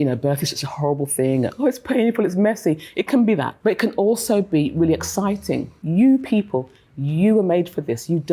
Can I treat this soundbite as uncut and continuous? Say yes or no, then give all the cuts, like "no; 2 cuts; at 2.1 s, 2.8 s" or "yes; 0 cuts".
no; 2 cuts; at 3.5 s, 5.8 s